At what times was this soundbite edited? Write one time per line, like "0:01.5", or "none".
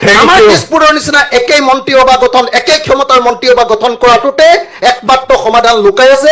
none